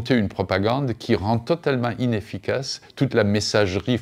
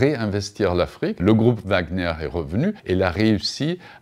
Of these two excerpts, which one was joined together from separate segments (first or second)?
second